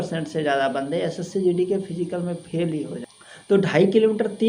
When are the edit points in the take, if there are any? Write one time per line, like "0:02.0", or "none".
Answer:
0:03.0